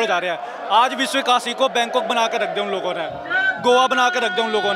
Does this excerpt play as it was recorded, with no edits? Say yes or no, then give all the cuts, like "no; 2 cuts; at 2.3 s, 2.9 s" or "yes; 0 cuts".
yes; 0 cuts